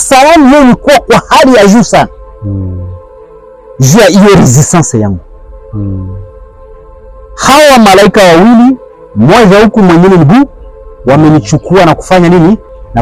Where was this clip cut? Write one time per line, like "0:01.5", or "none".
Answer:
none